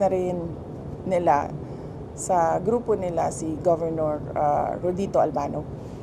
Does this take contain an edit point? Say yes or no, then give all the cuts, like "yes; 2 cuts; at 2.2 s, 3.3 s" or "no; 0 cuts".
no; 0 cuts